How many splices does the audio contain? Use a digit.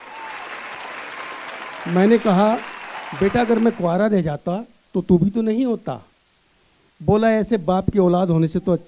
1